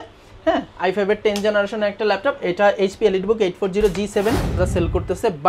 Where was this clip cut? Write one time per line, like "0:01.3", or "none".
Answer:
0:04.6